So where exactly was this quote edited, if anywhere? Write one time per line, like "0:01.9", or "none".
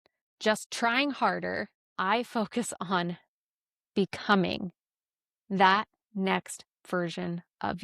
0:01.8